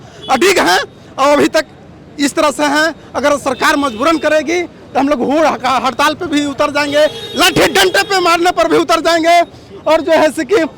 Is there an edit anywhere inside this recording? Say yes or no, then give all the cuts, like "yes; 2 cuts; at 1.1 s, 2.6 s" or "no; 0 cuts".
no; 0 cuts